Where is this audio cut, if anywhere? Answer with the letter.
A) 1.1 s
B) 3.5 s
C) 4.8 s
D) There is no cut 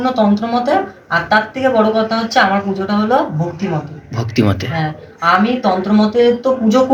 D